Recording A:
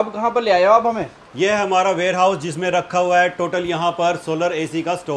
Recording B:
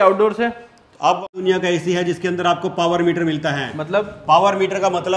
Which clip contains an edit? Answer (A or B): B